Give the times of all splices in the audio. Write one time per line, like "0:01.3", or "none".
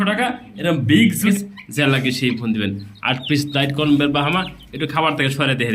0:01.3